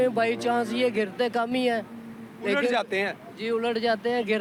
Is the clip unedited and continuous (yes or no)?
yes